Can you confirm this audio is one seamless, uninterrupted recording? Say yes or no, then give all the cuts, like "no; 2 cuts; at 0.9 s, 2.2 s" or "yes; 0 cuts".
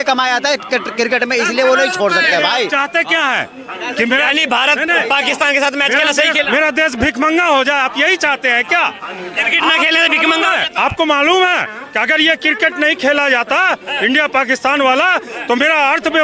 yes; 0 cuts